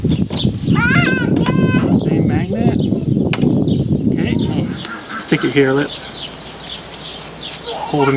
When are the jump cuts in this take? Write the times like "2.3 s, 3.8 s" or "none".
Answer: 4.7 s

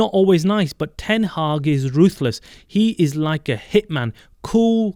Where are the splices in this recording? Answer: none

